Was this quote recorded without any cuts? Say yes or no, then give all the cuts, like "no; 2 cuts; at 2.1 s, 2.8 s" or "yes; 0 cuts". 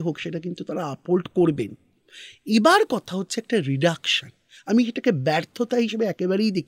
yes; 0 cuts